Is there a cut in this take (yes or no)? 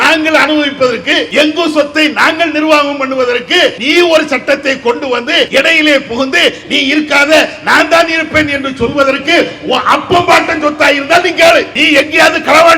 yes